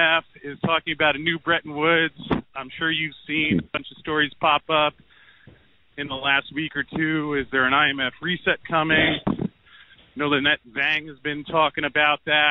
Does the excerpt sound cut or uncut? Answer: uncut